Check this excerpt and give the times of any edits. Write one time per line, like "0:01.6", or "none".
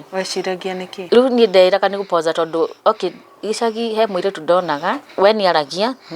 0:01.0
0:05.1